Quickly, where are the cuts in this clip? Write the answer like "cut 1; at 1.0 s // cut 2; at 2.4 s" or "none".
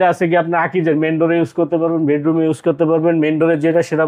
none